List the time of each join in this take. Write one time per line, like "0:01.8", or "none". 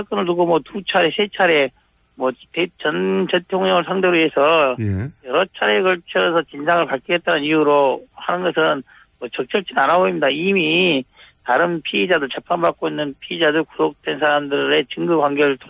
0:11.2